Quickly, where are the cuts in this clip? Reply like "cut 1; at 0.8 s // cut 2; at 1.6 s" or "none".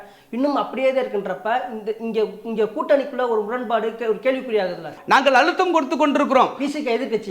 cut 1; at 4.9 s